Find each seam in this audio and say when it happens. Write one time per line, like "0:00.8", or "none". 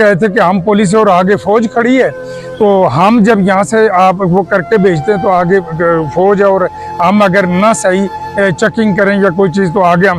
none

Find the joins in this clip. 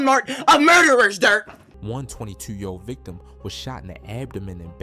0:01.6

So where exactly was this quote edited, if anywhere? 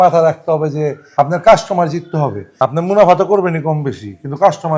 0:01.0
0:02.4

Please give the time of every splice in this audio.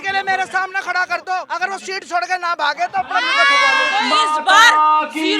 0:01.5
0:03.9

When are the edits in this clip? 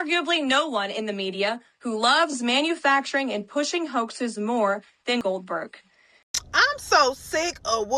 0:06.1

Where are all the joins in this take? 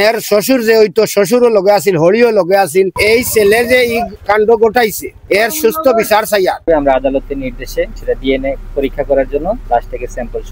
0:03.0
0:06.7
0:08.0
0:09.6

